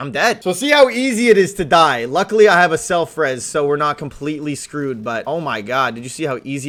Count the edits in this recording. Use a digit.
0